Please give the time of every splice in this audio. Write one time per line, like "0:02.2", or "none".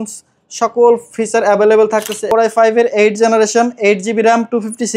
0:02.3